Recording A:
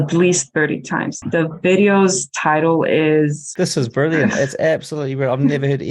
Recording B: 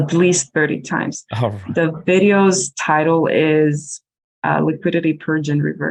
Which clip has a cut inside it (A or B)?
A